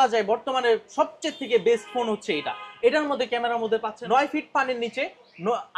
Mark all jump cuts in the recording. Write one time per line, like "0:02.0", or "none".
0:03.9